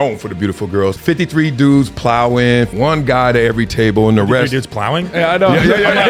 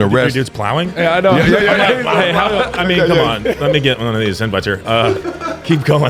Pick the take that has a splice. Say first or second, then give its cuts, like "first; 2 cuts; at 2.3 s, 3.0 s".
first; 2 cuts; at 1.0 s, 2.7 s